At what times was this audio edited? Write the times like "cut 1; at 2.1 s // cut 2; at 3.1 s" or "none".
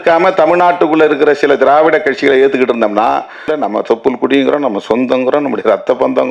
cut 1; at 3.5 s